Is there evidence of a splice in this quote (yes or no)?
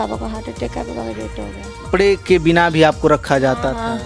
yes